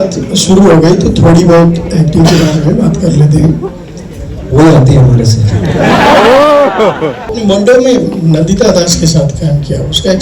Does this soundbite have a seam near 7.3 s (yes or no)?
yes